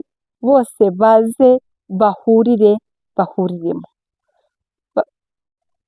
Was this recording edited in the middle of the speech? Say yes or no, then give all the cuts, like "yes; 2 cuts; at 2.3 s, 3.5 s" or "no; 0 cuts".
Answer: no; 0 cuts